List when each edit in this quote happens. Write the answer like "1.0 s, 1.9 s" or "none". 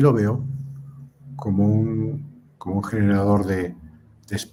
none